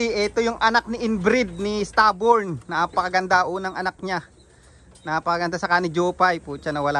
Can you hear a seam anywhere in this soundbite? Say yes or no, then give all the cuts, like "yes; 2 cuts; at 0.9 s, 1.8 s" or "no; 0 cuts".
no; 0 cuts